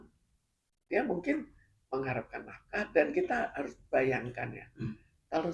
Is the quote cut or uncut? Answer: cut